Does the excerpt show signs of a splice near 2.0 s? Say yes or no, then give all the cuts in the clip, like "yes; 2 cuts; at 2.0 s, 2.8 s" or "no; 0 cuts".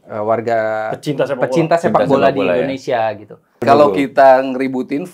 no; 1 cut; at 3.6 s